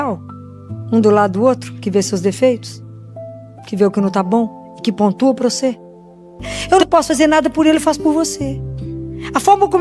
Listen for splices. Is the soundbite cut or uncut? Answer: cut